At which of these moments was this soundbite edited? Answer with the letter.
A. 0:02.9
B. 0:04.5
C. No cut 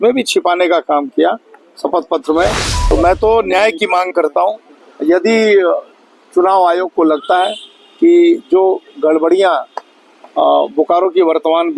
A